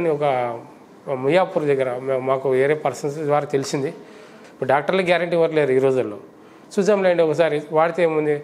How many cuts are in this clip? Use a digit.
1